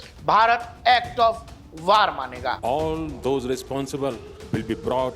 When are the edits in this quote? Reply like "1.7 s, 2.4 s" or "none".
2.6 s